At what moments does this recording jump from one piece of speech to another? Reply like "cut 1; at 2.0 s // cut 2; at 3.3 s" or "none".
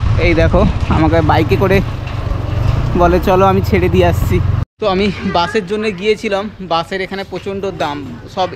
cut 1; at 4.7 s